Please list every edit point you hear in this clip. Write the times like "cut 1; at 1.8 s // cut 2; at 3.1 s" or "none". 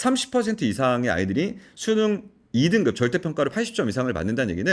none